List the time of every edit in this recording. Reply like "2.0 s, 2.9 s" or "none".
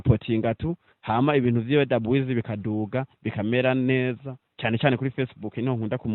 none